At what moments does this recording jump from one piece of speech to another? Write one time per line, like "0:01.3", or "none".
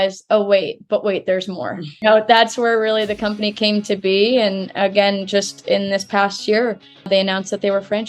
0:01.9
0:07.1